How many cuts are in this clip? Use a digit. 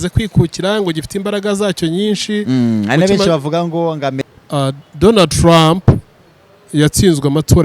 1